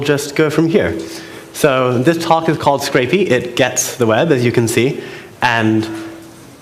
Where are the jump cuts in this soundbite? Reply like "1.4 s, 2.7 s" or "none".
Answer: none